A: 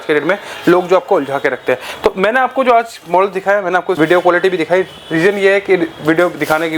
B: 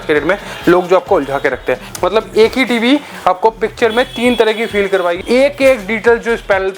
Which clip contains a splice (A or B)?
B